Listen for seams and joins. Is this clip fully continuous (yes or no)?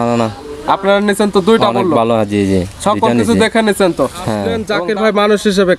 no